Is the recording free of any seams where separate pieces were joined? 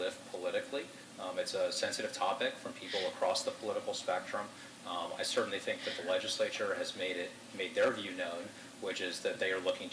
yes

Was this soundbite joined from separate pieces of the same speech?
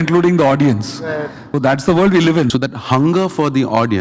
yes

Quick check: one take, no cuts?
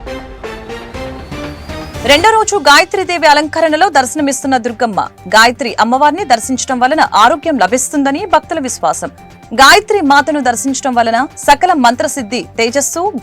no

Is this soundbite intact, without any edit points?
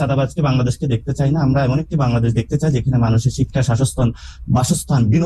yes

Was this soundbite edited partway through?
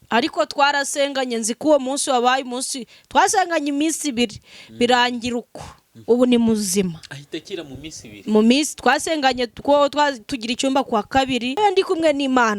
yes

